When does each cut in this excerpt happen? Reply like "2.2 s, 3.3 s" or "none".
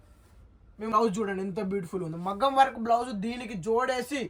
0.9 s